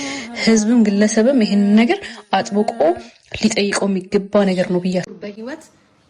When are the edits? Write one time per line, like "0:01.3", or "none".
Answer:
0:05.1